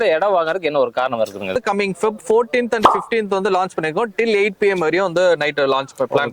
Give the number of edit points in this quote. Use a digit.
1